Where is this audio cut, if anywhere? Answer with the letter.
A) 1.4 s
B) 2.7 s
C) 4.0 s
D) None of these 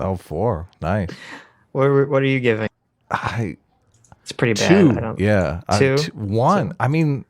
B